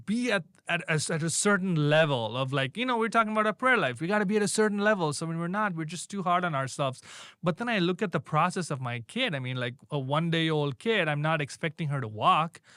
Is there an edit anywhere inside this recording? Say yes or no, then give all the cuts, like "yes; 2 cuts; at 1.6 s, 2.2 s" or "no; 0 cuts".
no; 0 cuts